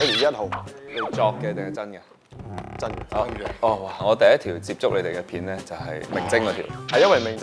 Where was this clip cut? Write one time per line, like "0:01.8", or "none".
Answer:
0:04.0
0:06.1